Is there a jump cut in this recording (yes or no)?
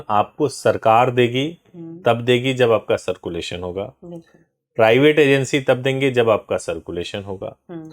no